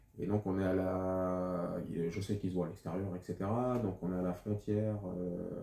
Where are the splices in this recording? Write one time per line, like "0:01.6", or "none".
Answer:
none